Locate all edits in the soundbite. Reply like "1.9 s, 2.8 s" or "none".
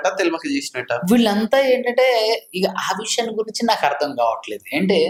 none